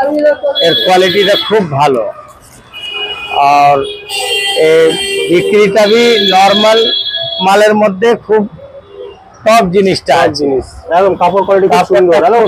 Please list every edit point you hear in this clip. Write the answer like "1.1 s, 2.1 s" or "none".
none